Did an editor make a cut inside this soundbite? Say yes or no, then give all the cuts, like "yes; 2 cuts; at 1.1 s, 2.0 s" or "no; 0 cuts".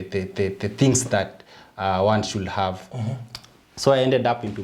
no; 0 cuts